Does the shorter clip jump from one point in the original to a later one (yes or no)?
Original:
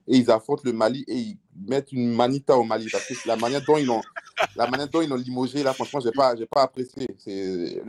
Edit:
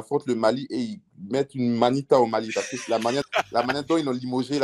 yes